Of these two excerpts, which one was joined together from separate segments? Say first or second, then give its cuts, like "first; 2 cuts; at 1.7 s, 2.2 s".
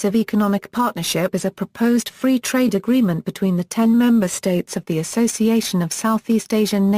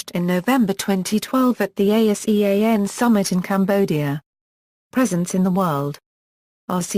first; 1 cut; at 1.0 s